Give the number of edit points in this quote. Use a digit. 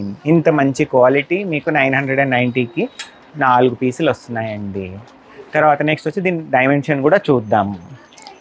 0